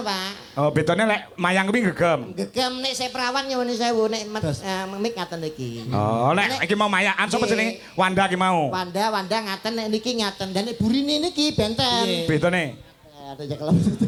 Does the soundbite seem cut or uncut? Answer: uncut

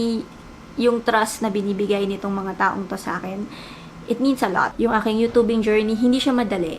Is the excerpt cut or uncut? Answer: cut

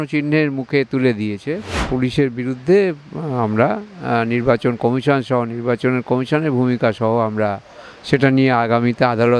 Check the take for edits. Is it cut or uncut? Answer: cut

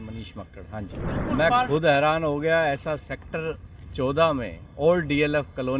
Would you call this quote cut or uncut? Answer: cut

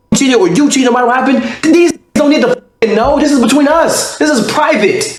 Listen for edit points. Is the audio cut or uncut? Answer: uncut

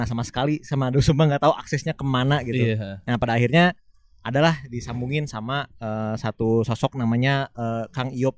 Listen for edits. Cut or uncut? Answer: uncut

